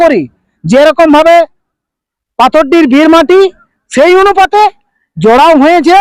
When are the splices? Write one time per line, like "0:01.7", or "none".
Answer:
none